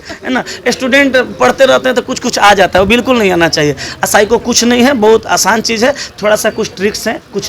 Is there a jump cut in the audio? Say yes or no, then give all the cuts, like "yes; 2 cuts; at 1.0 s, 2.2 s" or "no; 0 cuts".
no; 0 cuts